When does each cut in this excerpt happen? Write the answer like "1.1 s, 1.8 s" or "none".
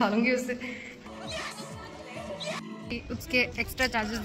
3.0 s